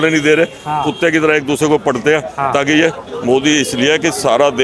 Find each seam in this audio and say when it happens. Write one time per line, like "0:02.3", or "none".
none